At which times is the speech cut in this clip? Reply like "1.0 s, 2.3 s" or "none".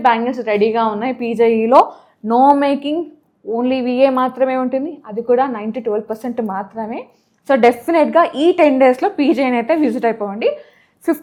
none